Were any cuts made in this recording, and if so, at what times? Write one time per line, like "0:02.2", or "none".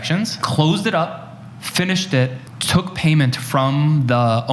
none